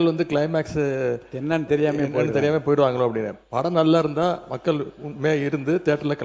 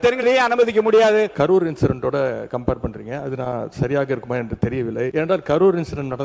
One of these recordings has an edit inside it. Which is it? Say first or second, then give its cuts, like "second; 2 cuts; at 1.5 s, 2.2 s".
second; 2 cuts; at 1.3 s, 5.1 s